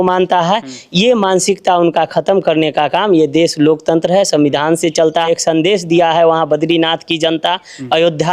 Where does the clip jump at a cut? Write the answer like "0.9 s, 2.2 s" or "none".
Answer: 5.3 s